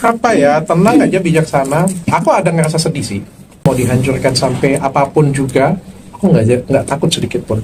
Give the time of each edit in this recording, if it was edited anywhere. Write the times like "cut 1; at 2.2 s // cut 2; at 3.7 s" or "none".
cut 1; at 3.6 s